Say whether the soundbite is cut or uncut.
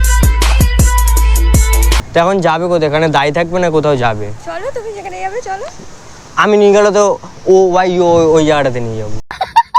cut